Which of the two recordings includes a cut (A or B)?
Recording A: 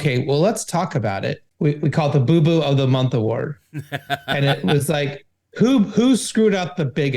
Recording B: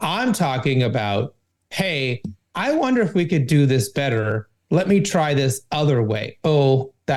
A